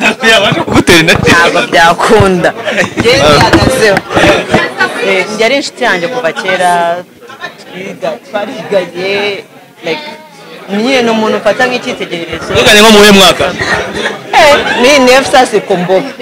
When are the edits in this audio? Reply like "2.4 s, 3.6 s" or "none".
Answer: 4.6 s